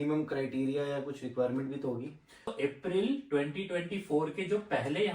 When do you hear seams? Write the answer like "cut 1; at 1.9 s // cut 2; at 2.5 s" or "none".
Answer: cut 1; at 2.5 s

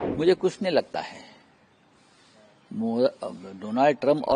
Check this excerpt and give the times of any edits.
none

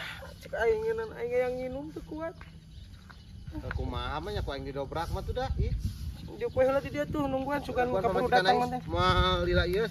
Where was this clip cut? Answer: none

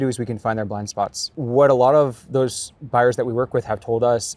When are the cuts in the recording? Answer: cut 1; at 1.3 s

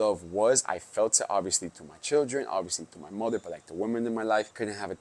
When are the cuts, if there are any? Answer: none

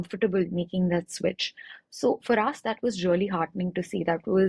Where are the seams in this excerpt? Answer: none

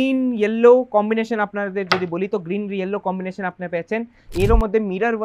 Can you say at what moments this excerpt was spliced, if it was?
cut 1; at 4.3 s

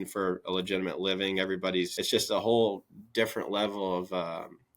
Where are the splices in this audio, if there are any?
cut 1; at 2.0 s

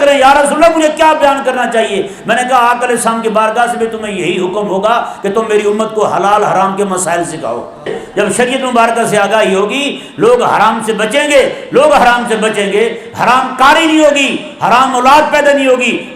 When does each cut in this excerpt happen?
cut 1; at 8.0 s

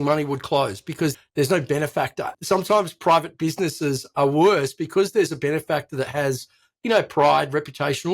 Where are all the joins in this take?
cut 1; at 1.1 s // cut 2; at 2.3 s

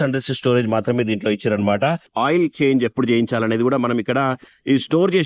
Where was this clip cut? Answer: cut 1; at 2.1 s

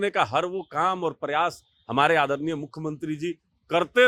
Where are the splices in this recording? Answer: none

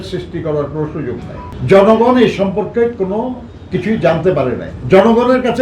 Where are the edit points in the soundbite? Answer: cut 1; at 1.5 s // cut 2; at 4.7 s

